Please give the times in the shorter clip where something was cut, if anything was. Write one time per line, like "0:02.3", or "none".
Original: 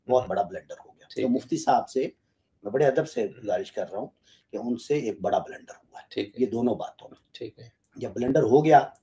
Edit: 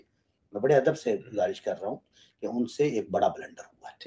none